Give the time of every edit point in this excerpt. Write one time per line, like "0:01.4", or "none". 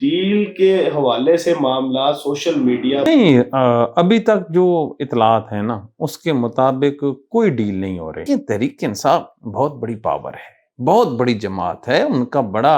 0:03.1
0:08.2

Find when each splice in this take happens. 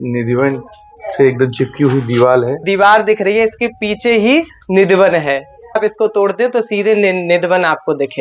0:02.6
0:05.8

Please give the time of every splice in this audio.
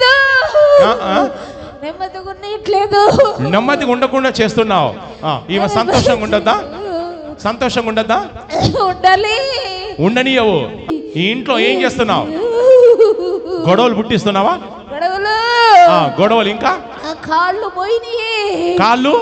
0:10.9

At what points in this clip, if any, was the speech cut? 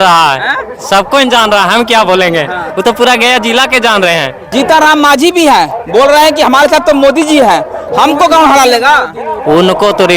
0:04.5

